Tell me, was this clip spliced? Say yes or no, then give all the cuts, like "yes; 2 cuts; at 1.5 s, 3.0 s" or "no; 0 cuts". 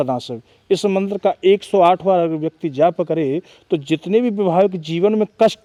no; 0 cuts